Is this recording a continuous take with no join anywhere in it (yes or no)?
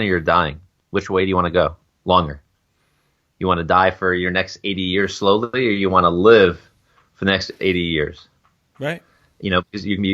yes